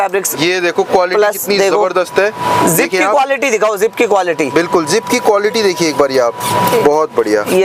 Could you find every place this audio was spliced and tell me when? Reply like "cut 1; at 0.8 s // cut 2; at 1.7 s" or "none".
none